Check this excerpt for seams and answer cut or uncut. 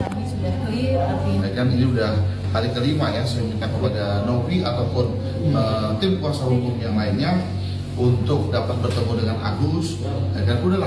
cut